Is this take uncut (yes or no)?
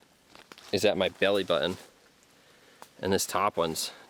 yes